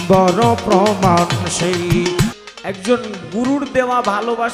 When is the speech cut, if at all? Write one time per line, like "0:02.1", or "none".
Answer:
0:02.4